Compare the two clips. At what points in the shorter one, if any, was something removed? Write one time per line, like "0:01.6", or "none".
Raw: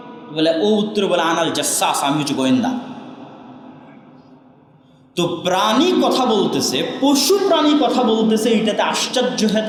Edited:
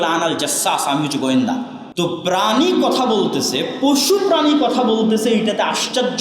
0:01.8

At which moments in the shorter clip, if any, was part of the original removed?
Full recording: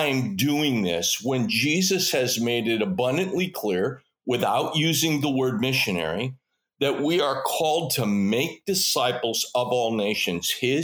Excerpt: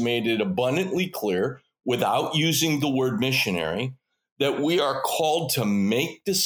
none

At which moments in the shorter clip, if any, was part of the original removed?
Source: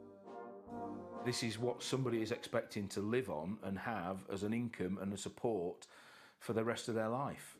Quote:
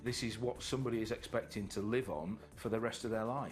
0:02.4

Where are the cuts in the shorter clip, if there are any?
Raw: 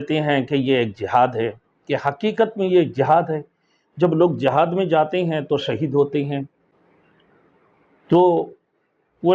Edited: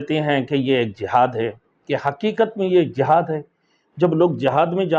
none

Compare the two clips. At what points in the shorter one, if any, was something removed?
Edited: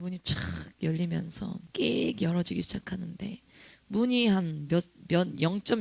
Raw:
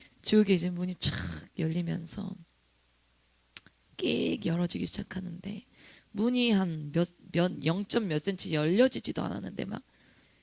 0:01.7

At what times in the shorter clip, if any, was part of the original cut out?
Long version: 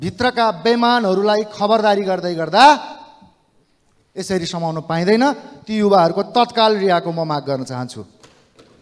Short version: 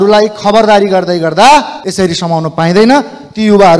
0:01.8

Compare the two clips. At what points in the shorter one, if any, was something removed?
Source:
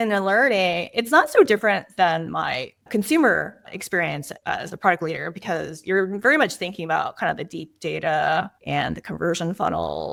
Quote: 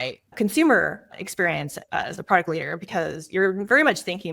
none

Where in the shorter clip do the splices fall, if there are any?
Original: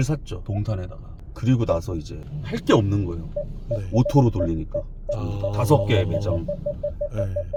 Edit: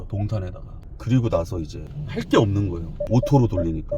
0:03.0

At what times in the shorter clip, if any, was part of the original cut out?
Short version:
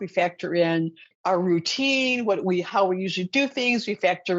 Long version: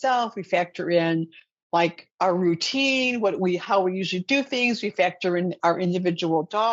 0:01.1

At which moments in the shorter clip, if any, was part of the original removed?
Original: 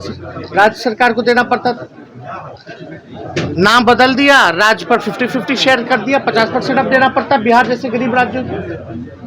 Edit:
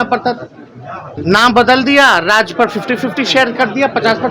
0:01.2

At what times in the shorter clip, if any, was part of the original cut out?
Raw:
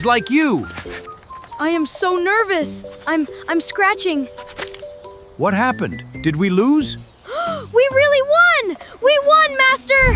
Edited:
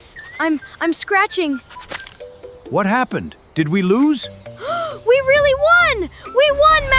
none

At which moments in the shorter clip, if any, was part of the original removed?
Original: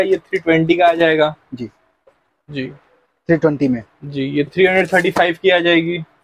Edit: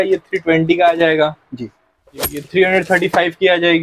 0:02.4

